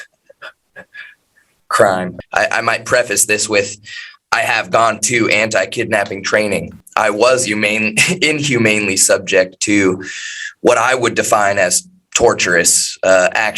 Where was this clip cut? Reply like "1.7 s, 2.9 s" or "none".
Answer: 2.2 s, 6.8 s